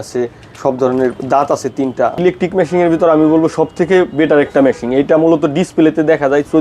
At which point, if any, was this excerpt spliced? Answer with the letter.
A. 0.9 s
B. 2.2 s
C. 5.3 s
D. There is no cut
B